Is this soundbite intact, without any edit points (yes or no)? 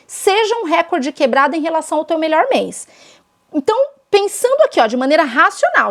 yes